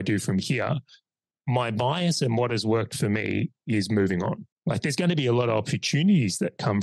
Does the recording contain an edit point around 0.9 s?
no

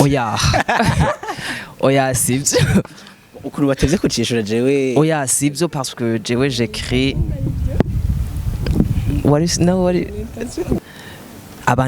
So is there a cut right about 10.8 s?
yes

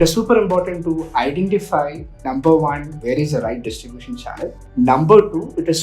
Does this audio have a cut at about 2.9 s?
yes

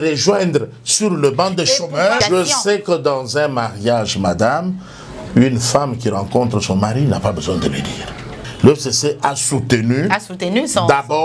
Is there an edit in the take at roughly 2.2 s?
yes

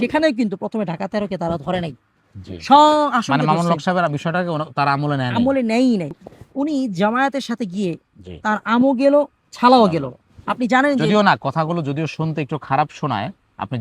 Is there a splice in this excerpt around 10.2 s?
no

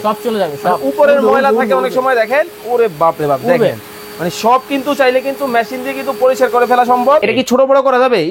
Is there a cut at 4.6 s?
no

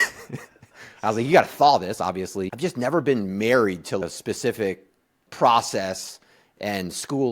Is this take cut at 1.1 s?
no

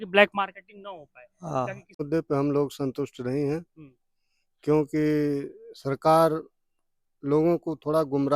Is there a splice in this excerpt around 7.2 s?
no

